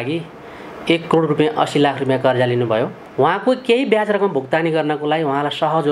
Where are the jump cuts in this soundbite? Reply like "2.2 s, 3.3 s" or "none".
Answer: 3.0 s